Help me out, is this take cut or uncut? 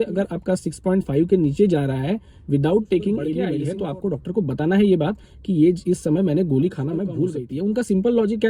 cut